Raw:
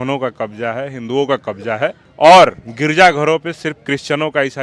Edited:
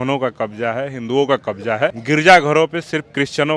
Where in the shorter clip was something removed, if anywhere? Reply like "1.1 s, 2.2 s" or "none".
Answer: 2.0 s